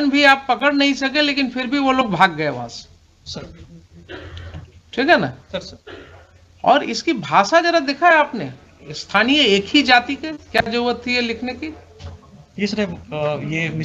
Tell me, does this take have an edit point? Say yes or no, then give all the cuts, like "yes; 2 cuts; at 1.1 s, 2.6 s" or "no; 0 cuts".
no; 0 cuts